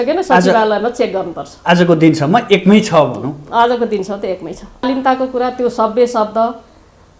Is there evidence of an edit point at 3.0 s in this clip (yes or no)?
no